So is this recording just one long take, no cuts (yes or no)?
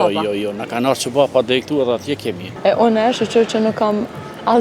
no